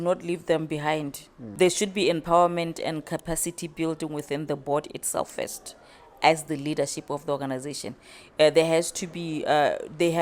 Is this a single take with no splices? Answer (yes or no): no